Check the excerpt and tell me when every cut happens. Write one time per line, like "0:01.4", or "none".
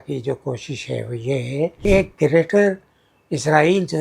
0:01.8